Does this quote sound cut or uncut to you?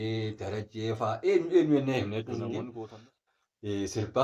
cut